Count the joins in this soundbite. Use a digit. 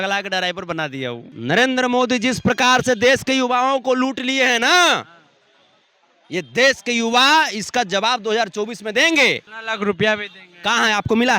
2